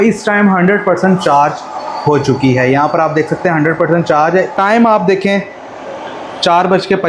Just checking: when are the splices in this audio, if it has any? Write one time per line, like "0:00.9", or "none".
0:04.5

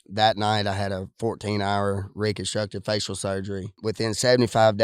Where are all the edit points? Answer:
0:03.8

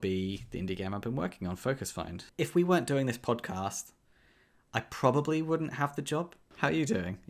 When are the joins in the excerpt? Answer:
0:02.2
0:06.4

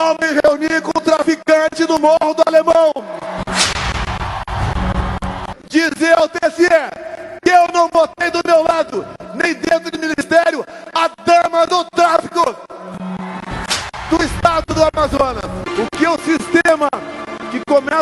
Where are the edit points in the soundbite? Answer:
0:05.5
0:15.7

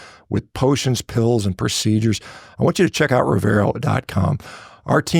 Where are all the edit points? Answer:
none

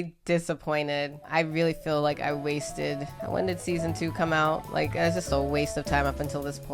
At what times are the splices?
none

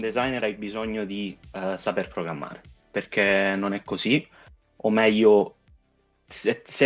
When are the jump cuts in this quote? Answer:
none

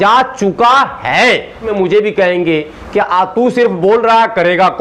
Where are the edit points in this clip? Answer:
0:01.6

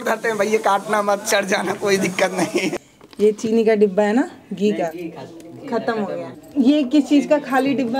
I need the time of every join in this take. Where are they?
0:02.8
0:06.4

